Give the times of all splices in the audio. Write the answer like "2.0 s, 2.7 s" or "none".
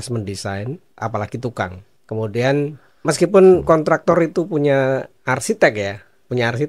0.9 s, 1.9 s, 2.9 s, 5.1 s